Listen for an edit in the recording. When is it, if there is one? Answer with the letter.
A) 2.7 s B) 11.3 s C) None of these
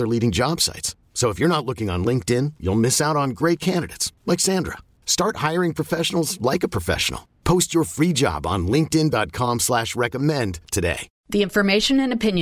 B